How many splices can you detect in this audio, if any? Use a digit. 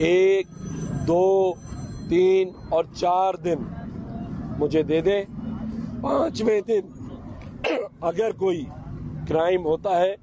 0